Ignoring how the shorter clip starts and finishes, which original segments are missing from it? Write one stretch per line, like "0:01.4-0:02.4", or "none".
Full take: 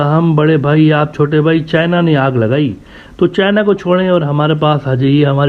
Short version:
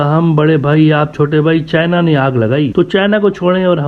0:02.7-0:03.1